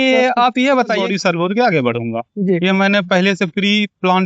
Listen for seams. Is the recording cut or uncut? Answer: cut